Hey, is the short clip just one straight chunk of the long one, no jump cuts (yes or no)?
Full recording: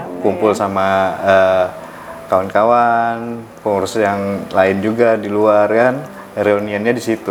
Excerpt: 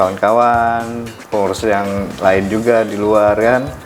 yes